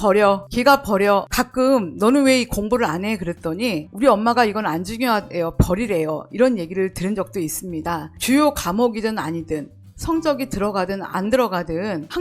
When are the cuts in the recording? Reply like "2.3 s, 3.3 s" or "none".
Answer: 1.3 s, 8.1 s